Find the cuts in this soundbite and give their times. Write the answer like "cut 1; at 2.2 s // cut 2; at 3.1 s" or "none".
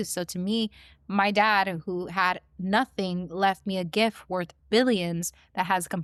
none